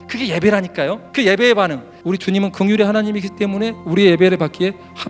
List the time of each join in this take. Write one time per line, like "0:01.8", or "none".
0:01.9